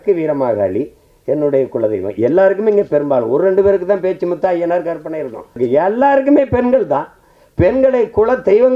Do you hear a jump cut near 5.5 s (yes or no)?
yes